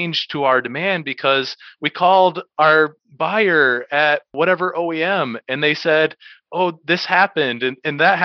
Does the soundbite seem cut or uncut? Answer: cut